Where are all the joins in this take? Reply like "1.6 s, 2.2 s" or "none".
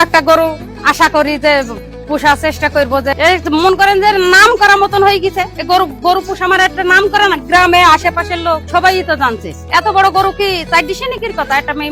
5.5 s, 8.6 s